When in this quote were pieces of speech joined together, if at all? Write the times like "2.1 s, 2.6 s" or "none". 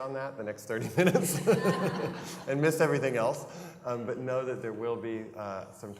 1.6 s